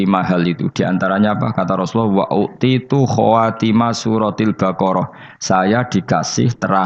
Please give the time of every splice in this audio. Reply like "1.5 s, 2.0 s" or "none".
none